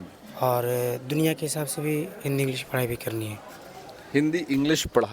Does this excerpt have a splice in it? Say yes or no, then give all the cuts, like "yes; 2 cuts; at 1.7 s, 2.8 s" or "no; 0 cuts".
no; 0 cuts